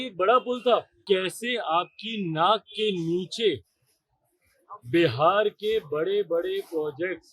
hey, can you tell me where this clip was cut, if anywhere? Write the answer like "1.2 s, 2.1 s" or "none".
0.9 s